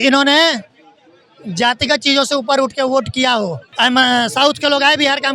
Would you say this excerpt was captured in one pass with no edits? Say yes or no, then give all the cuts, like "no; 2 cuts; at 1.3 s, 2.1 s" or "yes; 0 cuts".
no; 1 cut; at 3.6 s